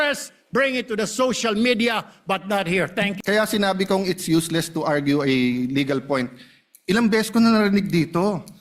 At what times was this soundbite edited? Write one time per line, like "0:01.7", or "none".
0:03.1